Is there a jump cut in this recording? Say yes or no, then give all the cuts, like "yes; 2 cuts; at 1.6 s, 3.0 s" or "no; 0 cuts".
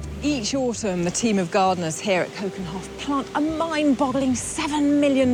no; 0 cuts